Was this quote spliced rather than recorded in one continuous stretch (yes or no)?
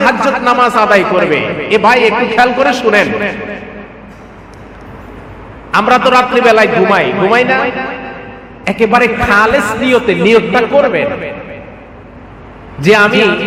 no